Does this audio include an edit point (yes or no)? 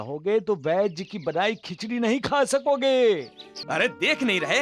yes